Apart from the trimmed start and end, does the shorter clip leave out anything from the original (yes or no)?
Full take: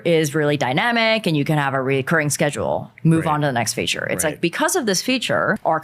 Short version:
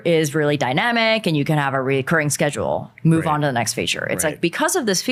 no